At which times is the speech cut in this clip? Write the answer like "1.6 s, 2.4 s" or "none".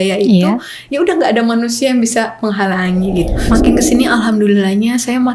3.4 s